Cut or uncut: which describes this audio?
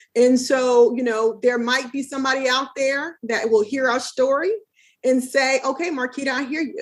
uncut